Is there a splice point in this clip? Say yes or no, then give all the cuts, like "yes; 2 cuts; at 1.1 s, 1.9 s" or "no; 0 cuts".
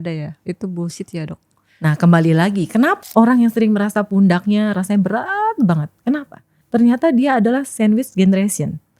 yes; 1 cut; at 3.0 s